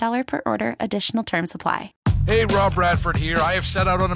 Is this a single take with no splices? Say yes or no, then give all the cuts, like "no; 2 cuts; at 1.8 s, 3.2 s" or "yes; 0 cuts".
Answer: no; 1 cut; at 1.9 s